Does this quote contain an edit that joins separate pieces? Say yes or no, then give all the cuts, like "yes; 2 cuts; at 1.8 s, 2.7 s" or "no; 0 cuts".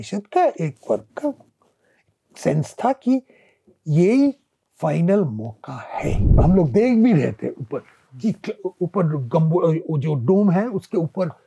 yes; 1 cut; at 6.3 s